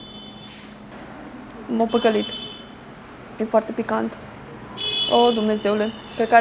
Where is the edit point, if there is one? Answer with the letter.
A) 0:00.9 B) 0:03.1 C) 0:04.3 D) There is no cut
A